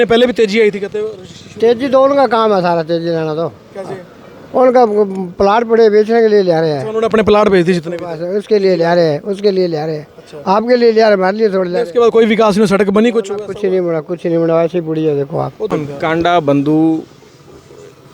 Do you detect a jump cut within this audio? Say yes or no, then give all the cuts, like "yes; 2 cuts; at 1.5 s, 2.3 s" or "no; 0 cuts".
yes; 1 cut; at 15.7 s